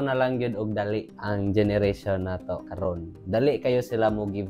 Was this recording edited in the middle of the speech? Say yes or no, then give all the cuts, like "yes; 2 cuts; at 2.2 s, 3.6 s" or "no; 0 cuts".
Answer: no; 0 cuts